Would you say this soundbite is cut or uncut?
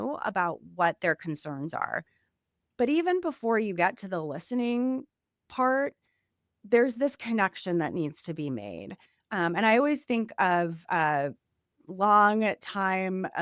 uncut